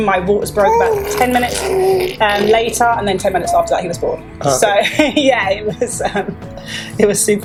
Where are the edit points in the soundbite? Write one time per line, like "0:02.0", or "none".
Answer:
none